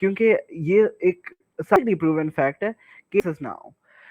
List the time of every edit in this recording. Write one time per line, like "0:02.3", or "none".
0:01.8
0:03.2

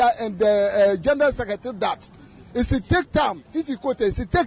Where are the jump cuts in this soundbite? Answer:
none

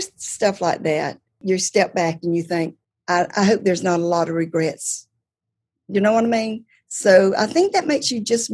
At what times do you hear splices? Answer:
0:01.4
0:02.9

